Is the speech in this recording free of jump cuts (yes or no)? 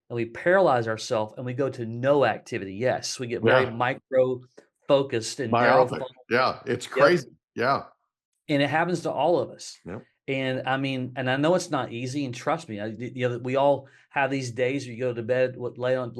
yes